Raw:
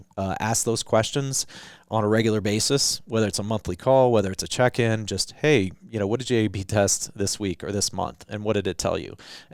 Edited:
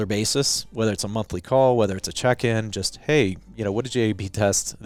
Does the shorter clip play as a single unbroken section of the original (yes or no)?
yes